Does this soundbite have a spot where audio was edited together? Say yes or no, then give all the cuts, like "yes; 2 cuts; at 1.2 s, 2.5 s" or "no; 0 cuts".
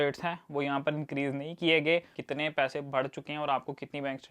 yes; 1 cut; at 2.2 s